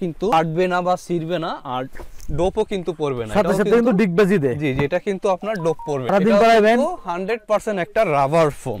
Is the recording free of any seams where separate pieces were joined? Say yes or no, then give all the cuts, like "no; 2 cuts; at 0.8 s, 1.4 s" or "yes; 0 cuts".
yes; 0 cuts